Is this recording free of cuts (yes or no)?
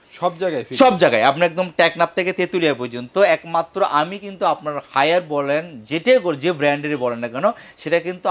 yes